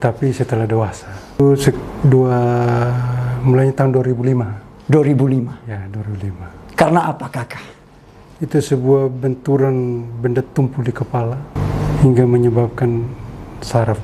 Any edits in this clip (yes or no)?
yes